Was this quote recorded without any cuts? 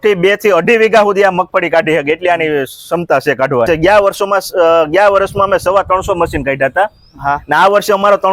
no; 1 cut; at 3.7 s

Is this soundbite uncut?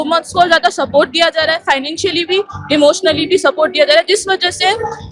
yes; 0 cuts

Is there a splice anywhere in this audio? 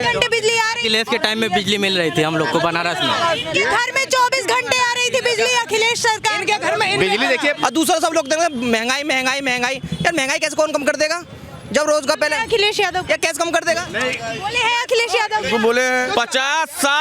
yes; 3 cuts; at 7.6 s, 13.9 s, 16.1 s

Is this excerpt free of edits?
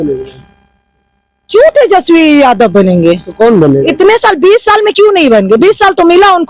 yes; 0 cuts

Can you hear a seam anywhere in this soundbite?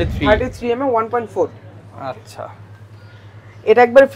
no; 0 cuts

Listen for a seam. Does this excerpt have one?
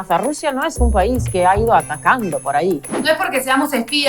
yes; 1 cut; at 3.0 s

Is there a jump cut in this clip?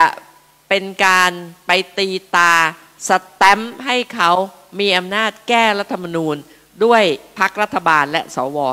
yes; 1 cut; at 7.3 s

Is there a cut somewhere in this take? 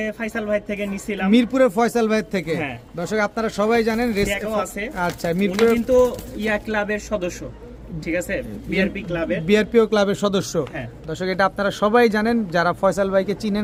no; 0 cuts

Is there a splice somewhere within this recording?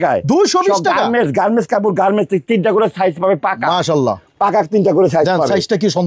no; 0 cuts

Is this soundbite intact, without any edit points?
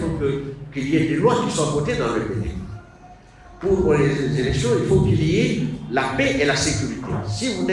yes; 0 cuts

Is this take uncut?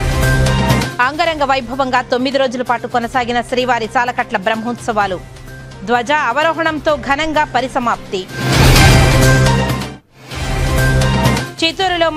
no; 1 cut; at 0.9 s

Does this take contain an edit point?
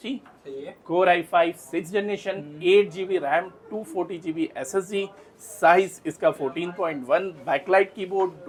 no; 0 cuts

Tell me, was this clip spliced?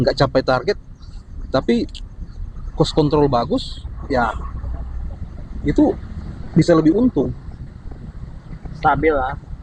no; 0 cuts

